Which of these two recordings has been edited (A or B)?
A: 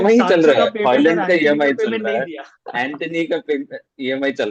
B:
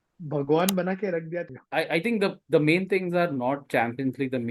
B